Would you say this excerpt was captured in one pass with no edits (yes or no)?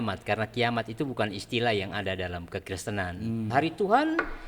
no